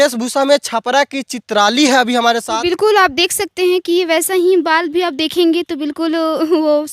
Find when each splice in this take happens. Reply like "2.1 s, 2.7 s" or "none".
2.5 s